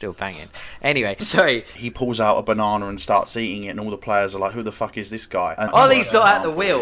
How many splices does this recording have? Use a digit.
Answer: 2